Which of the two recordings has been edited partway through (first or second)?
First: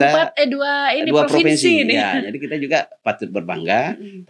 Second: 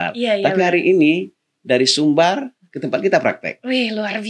first